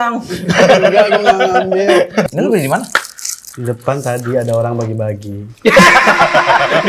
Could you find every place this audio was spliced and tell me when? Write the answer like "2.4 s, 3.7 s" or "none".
2.3 s